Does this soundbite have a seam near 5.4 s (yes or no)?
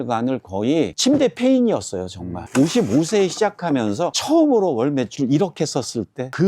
no